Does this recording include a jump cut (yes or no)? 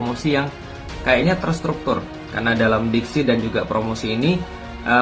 no